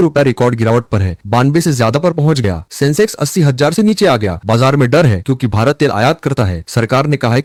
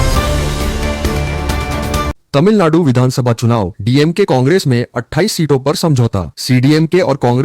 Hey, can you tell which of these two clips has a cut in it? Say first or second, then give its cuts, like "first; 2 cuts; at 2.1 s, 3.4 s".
second; 1 cut; at 2.2 s